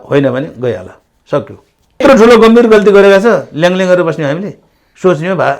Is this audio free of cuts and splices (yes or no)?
no